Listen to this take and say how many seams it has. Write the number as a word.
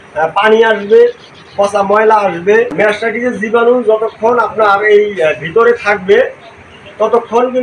one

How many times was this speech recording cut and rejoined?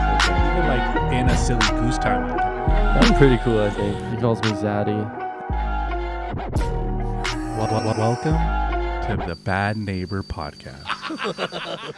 zero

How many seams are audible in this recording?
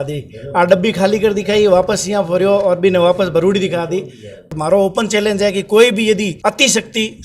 two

